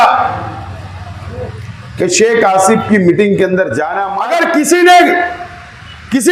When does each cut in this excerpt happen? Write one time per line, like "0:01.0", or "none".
0:04.0